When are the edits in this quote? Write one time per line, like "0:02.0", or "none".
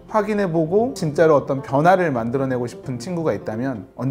0:01.0